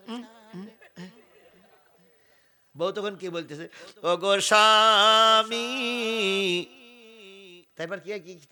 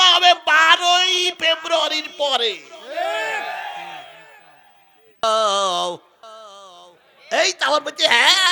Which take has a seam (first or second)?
second